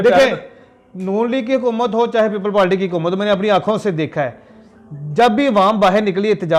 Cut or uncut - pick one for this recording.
uncut